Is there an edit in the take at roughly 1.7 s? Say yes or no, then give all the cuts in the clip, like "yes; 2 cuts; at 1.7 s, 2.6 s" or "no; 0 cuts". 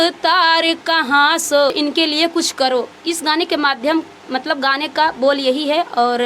yes; 1 cut; at 1.7 s